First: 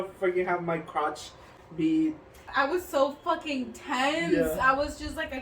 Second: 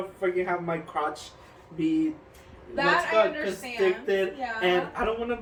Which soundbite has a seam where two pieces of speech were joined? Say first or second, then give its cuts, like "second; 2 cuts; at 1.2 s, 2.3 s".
first; 1 cut; at 2.4 s